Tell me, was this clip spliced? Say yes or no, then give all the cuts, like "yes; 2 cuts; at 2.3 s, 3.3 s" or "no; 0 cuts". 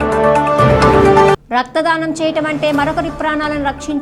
no; 0 cuts